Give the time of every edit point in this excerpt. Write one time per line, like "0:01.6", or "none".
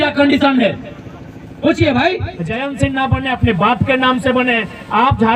0:02.6